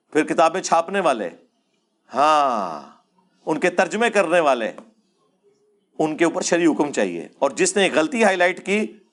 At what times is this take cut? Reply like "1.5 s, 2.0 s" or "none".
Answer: none

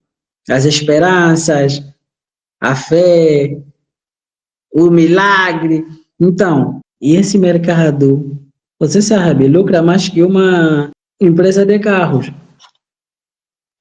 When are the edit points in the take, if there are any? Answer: 6.9 s, 11.0 s

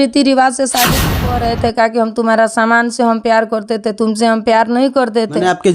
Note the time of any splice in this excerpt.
1.1 s

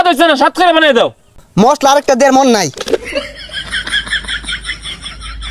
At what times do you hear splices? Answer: 1.3 s, 3.2 s

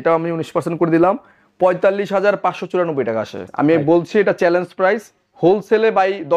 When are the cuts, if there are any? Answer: 3.4 s

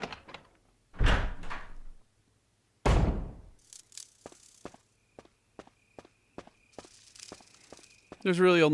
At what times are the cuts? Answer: none

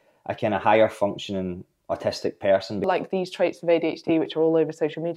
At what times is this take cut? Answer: 2.9 s

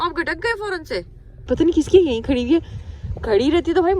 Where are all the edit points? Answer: 1.5 s

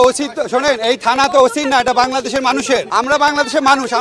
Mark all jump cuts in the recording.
2.9 s

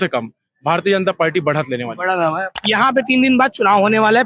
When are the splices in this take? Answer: 2.6 s

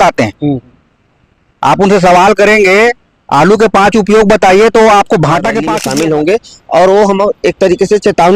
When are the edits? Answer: 5.7 s

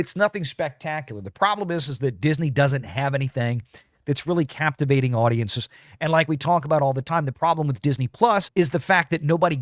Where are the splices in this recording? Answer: 8.5 s

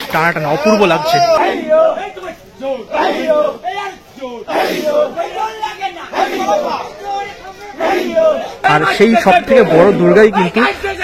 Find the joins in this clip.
1.2 s, 5.6 s, 8.7 s

